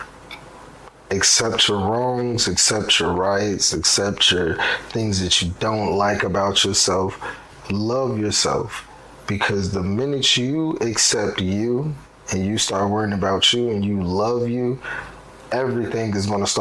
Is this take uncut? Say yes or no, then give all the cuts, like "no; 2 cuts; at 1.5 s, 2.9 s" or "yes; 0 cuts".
yes; 0 cuts